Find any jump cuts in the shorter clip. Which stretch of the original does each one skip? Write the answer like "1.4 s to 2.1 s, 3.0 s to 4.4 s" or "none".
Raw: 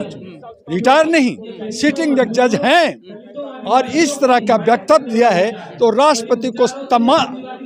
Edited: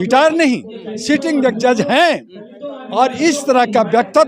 none